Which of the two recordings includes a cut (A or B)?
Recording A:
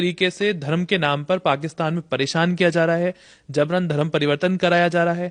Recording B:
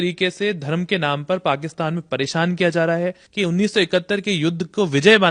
B